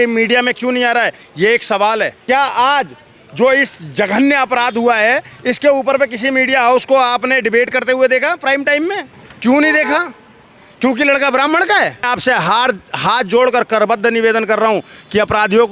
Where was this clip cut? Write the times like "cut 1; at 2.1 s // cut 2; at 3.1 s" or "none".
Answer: cut 1; at 2.1 s // cut 2; at 12.1 s